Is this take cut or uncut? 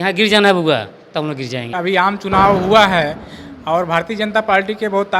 cut